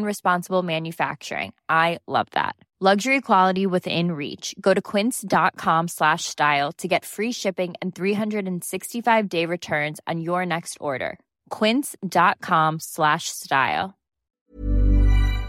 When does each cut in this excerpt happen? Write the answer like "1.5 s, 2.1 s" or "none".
14.4 s